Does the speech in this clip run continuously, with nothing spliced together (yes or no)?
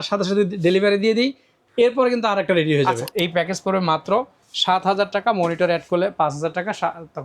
no